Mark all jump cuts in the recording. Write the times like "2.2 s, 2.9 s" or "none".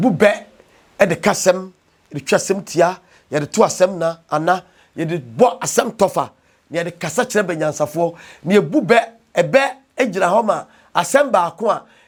none